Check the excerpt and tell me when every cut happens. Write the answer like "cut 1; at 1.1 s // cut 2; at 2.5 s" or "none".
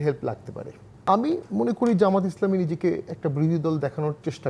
cut 1; at 1.1 s